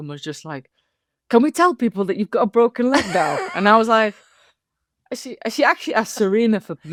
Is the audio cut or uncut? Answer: uncut